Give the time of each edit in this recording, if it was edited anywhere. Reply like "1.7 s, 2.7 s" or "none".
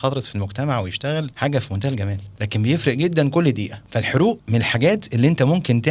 1.3 s, 2.3 s, 3.8 s, 4.4 s